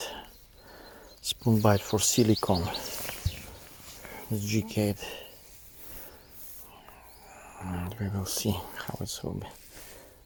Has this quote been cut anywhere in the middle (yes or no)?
no